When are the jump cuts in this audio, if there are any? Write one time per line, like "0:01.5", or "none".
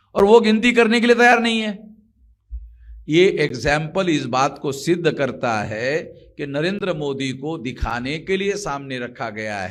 none

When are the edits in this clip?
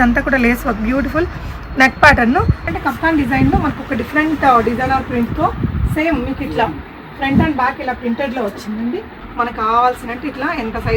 0:02.7
0:09.2

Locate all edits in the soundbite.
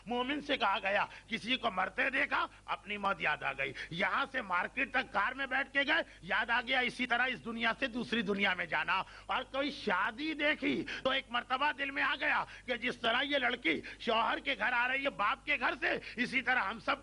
none

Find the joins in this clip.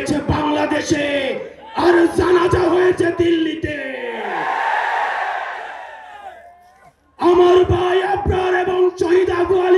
none

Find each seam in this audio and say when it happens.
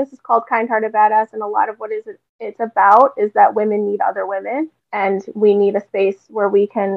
0:04.8

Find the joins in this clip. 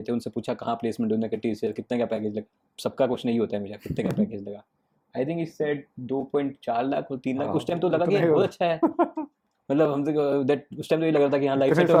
none

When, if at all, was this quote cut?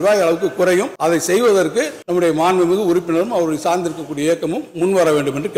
none

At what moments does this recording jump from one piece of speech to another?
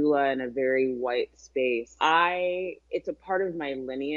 0:01.9
0:02.8

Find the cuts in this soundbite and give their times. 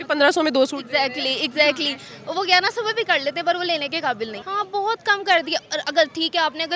0:04.4

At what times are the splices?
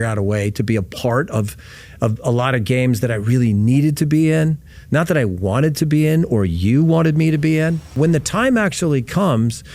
0:08.0

